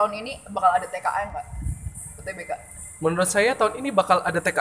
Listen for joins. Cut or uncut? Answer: uncut